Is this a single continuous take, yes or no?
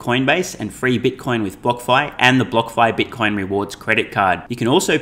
yes